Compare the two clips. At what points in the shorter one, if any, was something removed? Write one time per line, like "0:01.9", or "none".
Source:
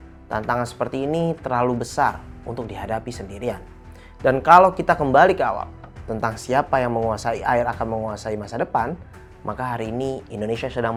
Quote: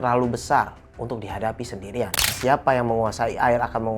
0:02.3